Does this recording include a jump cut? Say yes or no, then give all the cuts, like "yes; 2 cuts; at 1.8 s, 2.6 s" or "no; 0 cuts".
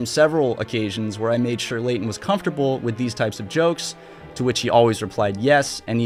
no; 0 cuts